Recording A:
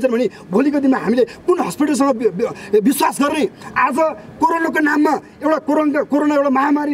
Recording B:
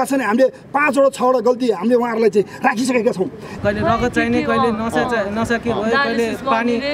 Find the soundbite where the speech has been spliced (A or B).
B